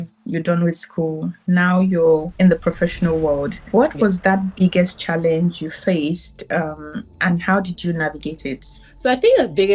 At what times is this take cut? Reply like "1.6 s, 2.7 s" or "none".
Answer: 2.3 s, 3.6 s, 8.8 s

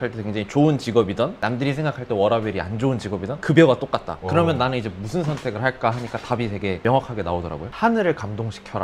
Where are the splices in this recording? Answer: 7.6 s

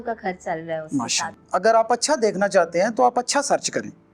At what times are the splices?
1.3 s

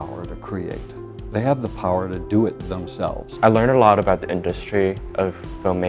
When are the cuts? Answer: 3.3 s

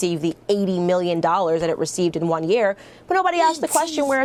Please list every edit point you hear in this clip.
none

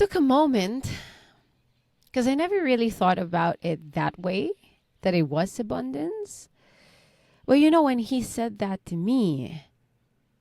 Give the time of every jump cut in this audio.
none

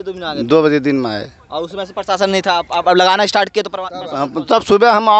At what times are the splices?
none

